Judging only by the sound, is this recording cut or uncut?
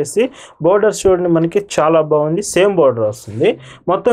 uncut